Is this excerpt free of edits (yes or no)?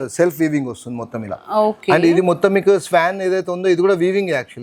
yes